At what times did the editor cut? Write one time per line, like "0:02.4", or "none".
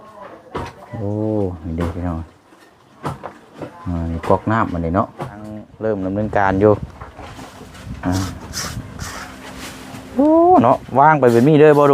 0:05.7